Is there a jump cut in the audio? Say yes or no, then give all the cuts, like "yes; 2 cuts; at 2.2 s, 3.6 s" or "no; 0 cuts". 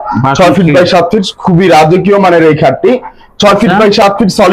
no; 0 cuts